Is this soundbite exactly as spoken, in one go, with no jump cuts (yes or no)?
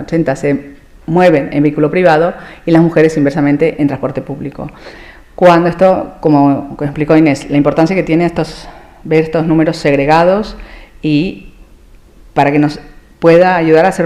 yes